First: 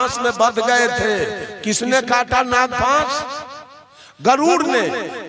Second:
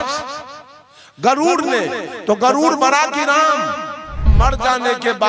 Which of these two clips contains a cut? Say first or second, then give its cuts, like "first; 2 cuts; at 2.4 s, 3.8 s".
second; 1 cut; at 4.3 s